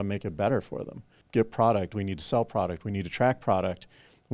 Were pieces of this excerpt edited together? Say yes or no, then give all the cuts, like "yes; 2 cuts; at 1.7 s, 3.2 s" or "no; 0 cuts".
yes; 1 cut; at 1.1 s